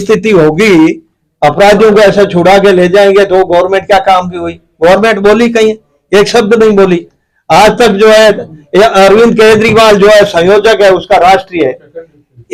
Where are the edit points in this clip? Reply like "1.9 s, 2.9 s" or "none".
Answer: none